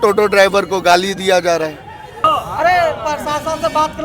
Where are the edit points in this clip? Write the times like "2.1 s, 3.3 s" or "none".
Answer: 2.2 s

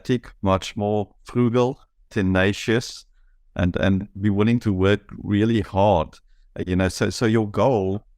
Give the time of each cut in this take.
7.1 s

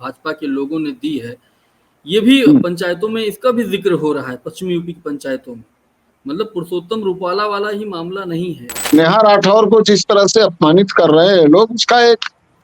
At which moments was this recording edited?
8.7 s

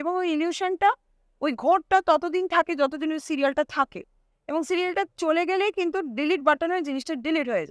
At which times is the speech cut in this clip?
none

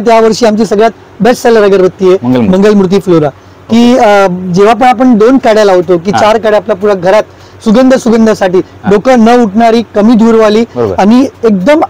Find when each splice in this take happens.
none

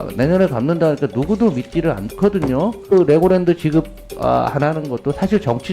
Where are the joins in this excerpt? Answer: 2.8 s

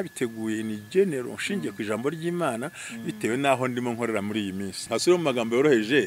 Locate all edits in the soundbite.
4.8 s

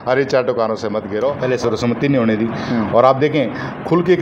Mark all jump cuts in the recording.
1.4 s

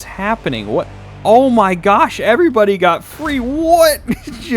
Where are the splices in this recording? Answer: none

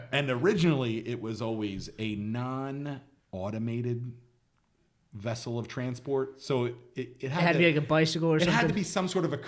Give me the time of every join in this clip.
3.1 s

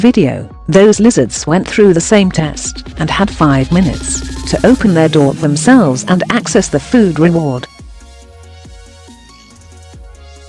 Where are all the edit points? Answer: 7.8 s

